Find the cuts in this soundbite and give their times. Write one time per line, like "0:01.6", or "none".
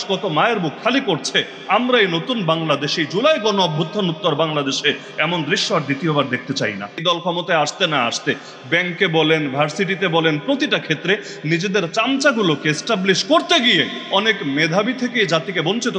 0:07.0